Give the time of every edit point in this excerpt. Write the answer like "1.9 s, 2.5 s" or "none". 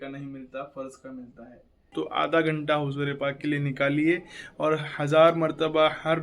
1.9 s